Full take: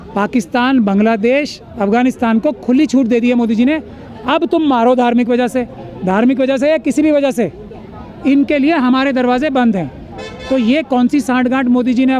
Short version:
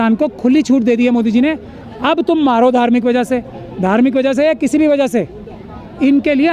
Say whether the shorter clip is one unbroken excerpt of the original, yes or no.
yes